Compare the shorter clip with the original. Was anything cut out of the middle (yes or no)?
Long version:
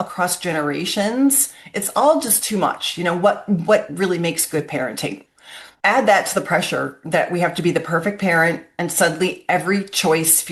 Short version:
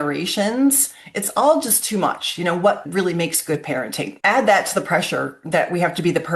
yes